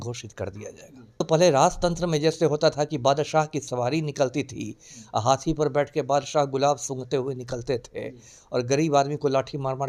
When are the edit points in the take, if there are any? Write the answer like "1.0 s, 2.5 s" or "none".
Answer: 1.2 s